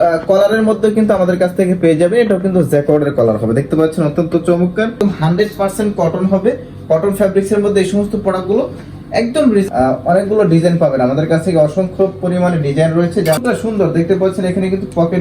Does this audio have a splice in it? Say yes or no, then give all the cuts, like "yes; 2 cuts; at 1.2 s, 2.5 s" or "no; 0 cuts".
yes; 3 cuts; at 5.0 s, 9.6 s, 13.4 s